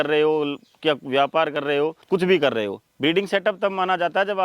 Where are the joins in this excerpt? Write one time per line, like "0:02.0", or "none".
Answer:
none